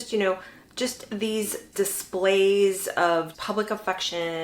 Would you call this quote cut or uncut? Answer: cut